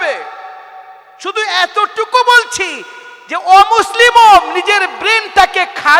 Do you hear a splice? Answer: no; 0 cuts

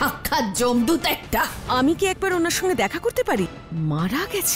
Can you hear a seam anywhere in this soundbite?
yes; 2 cuts; at 1.7 s, 3.6 s

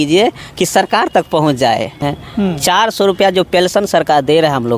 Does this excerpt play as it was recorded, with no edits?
no; 1 cut; at 2.0 s

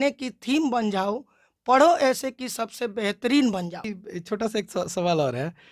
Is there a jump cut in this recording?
yes; 1 cut; at 3.9 s

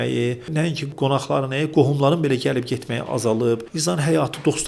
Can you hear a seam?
yes; 2 cuts; at 0.8 s, 3.7 s

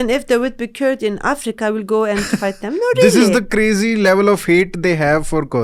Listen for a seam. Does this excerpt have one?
no; 0 cuts

